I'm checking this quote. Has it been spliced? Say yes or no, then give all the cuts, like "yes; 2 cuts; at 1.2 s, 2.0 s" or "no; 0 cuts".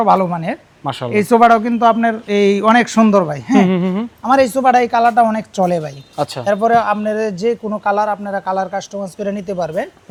no; 0 cuts